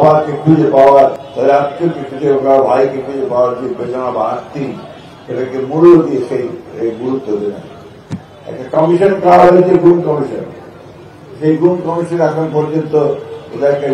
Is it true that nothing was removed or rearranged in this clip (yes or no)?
no